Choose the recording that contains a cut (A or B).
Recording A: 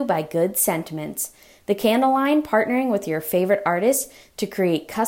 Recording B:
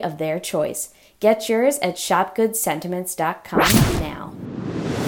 B